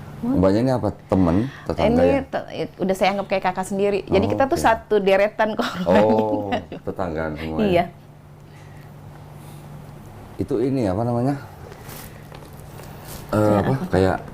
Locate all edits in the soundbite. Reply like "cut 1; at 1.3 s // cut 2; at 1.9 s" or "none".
cut 1; at 10.3 s